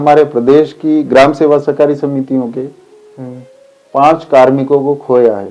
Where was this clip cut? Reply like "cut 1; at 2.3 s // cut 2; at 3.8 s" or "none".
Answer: none